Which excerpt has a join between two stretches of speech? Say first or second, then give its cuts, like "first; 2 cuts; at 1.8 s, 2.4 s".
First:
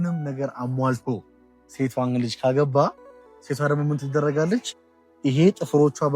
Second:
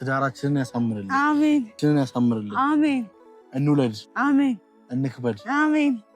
second; 1 cut; at 1.8 s